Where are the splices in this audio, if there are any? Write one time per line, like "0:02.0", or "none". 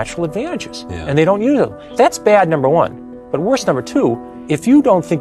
0:01.8
0:04.3